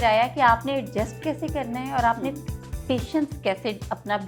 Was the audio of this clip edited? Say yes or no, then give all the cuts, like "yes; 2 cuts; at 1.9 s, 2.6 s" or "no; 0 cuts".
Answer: no; 0 cuts